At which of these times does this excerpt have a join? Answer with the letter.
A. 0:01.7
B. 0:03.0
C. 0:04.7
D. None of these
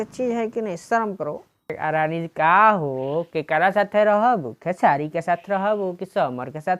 A